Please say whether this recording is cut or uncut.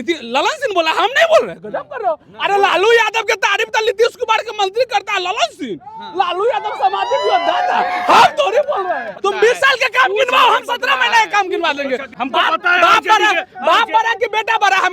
cut